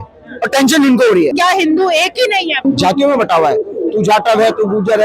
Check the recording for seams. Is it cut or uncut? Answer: cut